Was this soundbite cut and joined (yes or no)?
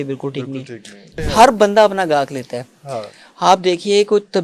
yes